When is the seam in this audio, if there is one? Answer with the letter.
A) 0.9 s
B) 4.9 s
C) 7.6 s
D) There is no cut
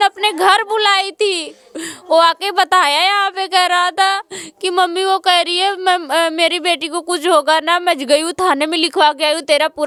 D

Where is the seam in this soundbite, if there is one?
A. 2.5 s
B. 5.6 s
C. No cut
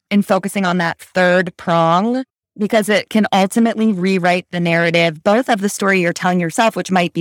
C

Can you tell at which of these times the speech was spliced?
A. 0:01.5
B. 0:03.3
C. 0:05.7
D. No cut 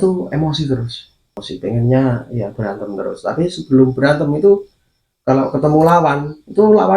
A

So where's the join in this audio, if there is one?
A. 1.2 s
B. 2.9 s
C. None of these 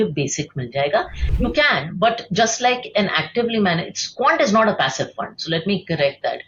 A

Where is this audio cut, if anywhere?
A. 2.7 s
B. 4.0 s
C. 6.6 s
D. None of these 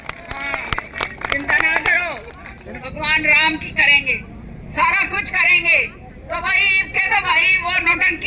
A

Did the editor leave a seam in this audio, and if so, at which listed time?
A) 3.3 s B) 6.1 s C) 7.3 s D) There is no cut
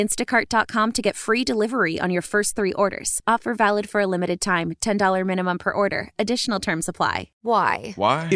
C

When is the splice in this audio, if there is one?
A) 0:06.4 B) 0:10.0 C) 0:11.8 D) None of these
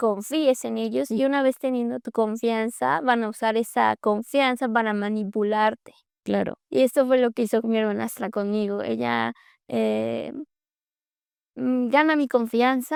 D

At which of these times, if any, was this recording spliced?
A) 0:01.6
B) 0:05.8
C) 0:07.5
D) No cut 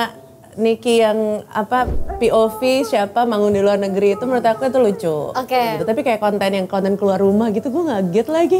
B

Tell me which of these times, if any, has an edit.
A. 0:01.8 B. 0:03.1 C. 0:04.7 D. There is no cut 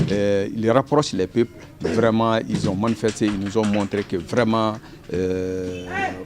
D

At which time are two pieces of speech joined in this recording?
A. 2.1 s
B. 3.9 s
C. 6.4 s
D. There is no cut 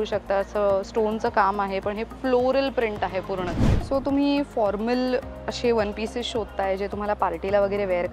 B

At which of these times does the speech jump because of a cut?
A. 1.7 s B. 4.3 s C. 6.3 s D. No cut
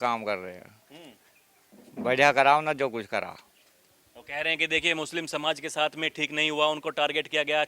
D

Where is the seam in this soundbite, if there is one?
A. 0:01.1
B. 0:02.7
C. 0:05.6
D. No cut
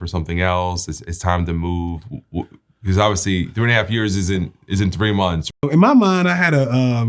C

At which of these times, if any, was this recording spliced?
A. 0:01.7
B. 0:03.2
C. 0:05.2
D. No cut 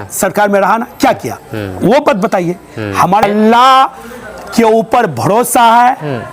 B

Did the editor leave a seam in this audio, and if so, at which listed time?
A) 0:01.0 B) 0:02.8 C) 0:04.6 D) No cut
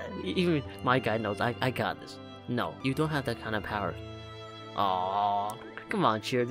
B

